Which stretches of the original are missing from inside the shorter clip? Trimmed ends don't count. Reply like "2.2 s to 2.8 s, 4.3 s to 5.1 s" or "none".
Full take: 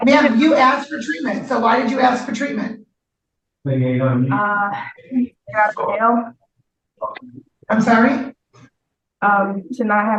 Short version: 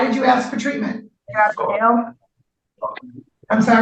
3.0 s to 5.4 s